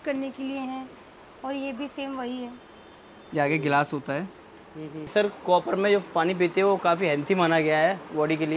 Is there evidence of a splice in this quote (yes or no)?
yes